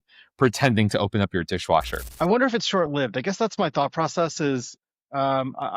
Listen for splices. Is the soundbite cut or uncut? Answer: cut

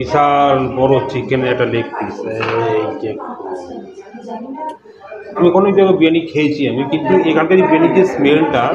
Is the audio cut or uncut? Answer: cut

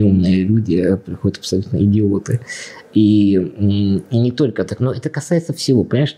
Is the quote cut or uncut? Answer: uncut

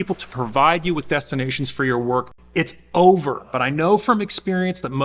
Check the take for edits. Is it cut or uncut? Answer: cut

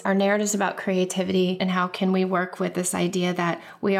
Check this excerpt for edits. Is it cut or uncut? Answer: cut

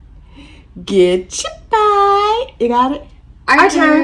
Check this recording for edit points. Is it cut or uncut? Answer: uncut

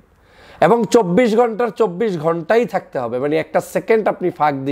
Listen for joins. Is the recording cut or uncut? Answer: uncut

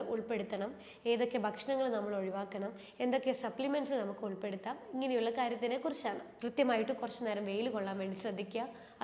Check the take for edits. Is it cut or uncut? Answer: cut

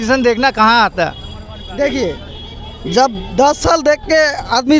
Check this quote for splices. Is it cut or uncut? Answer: uncut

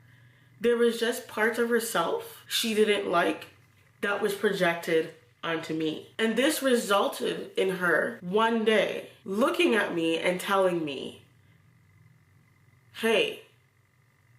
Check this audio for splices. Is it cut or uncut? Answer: uncut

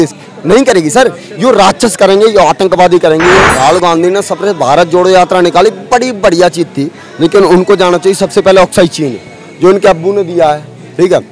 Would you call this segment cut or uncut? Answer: cut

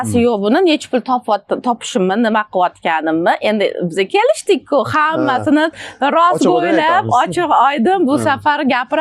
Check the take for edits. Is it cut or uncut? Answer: uncut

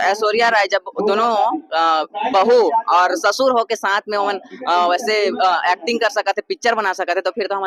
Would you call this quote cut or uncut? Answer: uncut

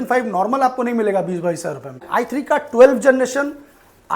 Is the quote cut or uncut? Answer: cut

